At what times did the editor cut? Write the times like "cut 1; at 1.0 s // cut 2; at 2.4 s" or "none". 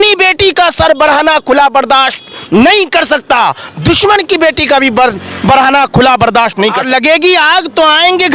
cut 1; at 6.8 s